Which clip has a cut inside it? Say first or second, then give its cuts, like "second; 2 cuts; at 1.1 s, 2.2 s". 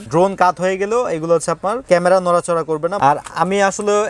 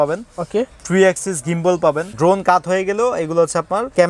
first; 1 cut; at 3.0 s